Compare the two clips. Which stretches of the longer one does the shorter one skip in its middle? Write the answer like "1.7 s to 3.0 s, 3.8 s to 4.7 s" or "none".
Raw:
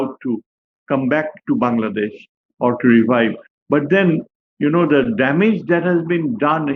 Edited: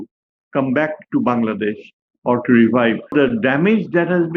3.5 s to 4.9 s